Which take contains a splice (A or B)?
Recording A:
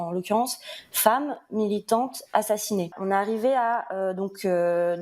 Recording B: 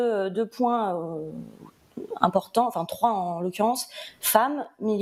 A